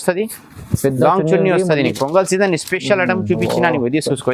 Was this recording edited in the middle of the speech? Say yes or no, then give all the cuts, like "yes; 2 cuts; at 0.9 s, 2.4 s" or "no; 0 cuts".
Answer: yes; 1 cut; at 1.9 s